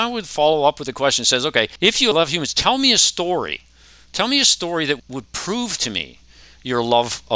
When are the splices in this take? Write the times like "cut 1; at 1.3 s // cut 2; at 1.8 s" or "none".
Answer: cut 1; at 1.9 s // cut 2; at 5.0 s